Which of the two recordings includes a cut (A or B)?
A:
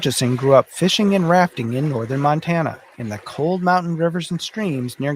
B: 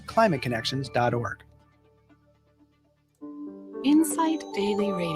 B